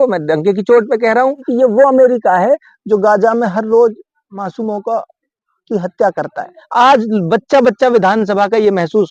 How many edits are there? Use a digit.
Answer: 2